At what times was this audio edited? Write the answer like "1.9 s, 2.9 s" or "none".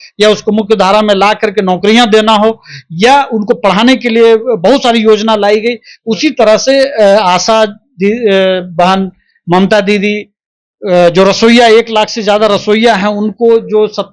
none